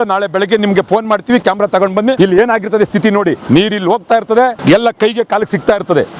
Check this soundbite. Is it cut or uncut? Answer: cut